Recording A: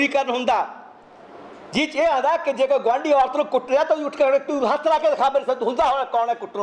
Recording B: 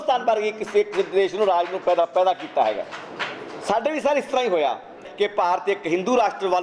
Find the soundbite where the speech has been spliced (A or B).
B